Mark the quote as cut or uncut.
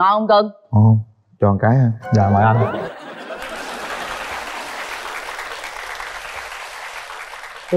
uncut